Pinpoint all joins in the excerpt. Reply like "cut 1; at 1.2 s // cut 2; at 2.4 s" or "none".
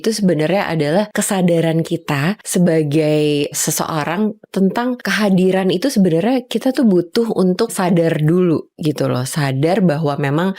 cut 1; at 1.2 s // cut 2; at 2.4 s // cut 3; at 3.6 s // cut 4; at 5.0 s // cut 5; at 7.7 s